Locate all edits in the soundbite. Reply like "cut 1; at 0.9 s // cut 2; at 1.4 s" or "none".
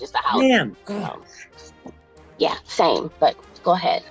cut 1; at 0.8 s // cut 2; at 3.1 s